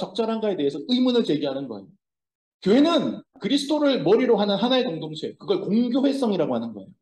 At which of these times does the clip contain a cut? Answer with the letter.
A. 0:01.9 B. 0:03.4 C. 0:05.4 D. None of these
B